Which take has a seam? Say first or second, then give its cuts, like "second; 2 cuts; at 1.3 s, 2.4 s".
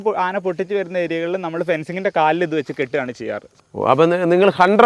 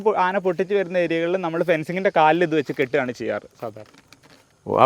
first; 1 cut; at 3.6 s